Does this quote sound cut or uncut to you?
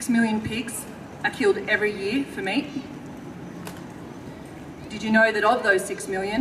cut